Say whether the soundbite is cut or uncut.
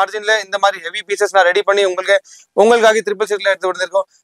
uncut